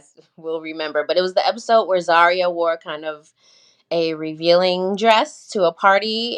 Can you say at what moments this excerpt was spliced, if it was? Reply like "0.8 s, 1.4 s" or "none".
none